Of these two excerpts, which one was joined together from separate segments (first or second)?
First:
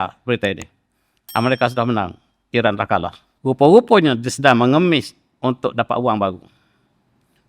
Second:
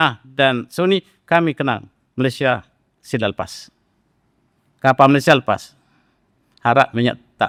first